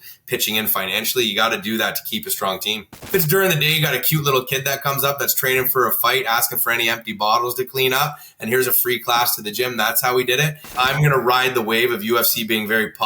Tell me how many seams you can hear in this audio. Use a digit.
2